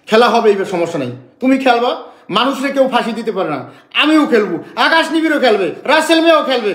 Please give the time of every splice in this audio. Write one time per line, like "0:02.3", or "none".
none